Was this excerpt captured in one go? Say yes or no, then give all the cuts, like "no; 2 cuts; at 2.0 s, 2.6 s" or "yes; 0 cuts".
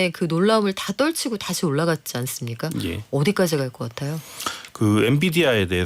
yes; 0 cuts